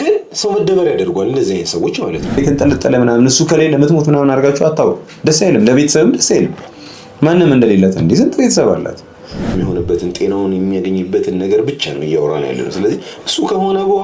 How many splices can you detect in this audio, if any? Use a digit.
2